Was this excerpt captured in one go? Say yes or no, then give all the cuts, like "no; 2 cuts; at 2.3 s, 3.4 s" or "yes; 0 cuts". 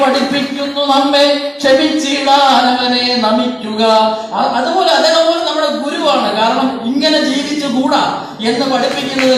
yes; 0 cuts